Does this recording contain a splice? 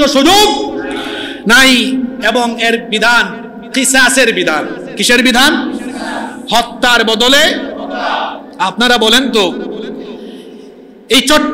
no; 0 cuts

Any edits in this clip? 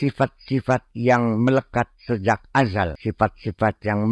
yes; 1 cut; at 3.0 s

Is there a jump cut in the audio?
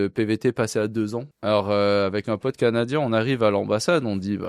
yes; 1 cut; at 1.3 s

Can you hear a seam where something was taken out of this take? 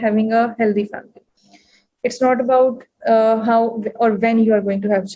no; 0 cuts

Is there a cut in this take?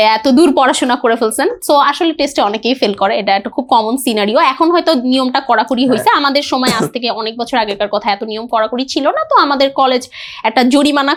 no; 0 cuts

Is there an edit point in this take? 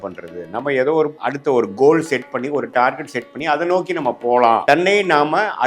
yes; 2 cuts; at 1.2 s, 4.6 s

